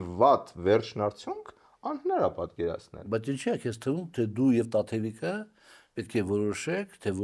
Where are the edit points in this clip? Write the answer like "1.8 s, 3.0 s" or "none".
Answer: none